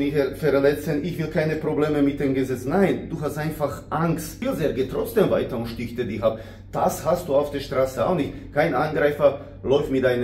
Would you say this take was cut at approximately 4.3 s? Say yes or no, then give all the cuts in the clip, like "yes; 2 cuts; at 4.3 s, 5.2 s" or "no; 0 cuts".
yes; 1 cut; at 4.3 s